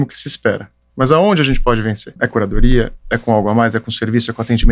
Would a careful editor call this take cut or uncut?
cut